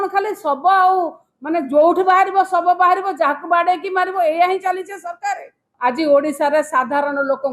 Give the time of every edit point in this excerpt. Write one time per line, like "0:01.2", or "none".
0:05.7

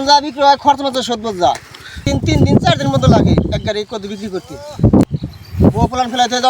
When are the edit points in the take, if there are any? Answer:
0:02.1
0:05.2

